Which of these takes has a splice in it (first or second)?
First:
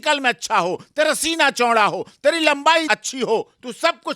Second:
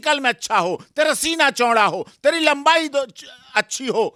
first